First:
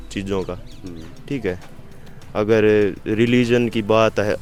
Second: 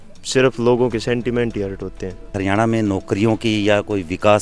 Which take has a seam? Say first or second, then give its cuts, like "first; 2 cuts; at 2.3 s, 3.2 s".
second; 1 cut; at 2.3 s